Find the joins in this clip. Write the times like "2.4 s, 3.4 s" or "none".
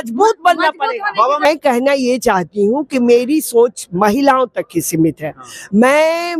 1.5 s